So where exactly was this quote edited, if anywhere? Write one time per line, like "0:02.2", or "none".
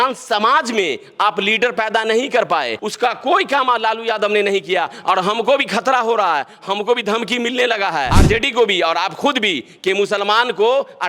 0:02.8
0:08.1